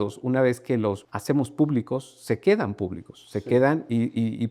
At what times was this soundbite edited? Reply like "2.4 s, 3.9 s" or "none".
1.1 s

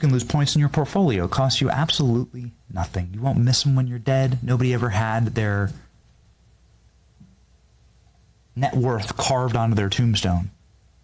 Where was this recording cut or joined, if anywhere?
none

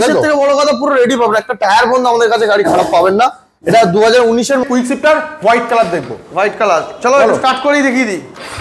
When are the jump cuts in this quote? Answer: 4.6 s

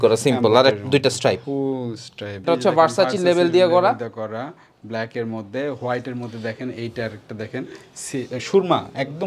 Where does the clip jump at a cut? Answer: 2.4 s

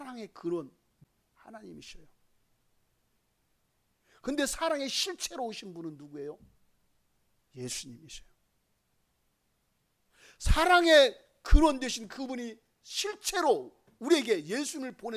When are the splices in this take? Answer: 1.0 s

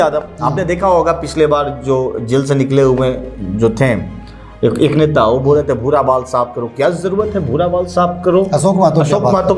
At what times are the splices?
none

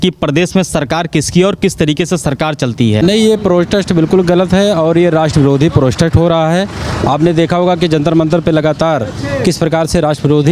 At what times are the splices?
3.0 s

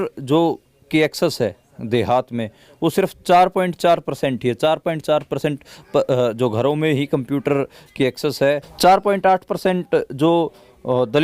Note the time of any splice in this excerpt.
8.7 s

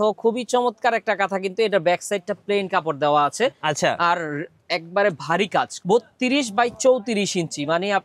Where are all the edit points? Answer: 5.7 s

